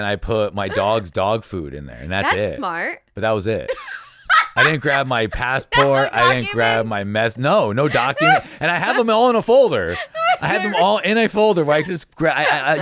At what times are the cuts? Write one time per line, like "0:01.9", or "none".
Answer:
none